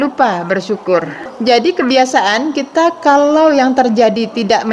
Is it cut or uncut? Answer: cut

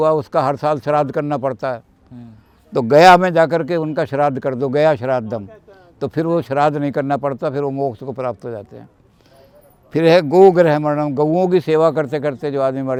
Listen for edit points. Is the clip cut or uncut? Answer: uncut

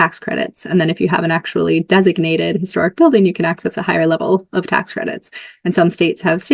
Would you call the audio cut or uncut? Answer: uncut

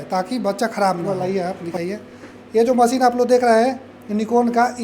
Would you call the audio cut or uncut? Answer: cut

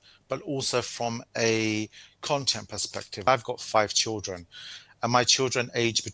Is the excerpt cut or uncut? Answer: cut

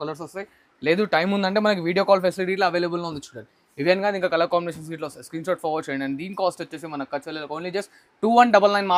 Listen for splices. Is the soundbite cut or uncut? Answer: uncut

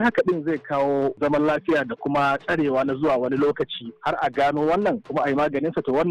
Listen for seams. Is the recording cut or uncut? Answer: cut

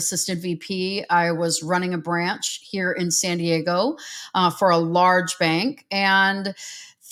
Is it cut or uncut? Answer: uncut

